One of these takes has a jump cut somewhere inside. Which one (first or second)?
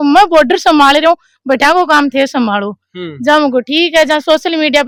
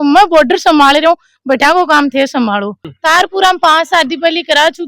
second